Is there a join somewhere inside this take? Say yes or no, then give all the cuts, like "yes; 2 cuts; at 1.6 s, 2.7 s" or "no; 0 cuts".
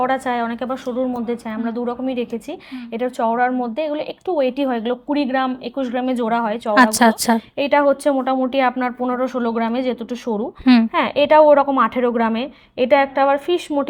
no; 0 cuts